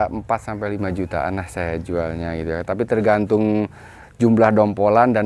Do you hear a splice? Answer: yes; 1 cut; at 4.0 s

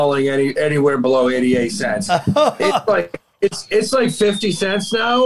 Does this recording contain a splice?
no; 0 cuts

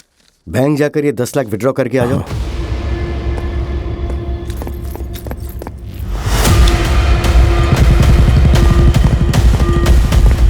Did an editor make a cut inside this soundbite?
no; 0 cuts

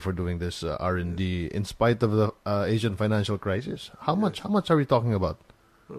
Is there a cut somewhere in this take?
yes; 1 cut; at 3.0 s

